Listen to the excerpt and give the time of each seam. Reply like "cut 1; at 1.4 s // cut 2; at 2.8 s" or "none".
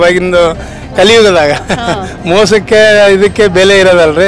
none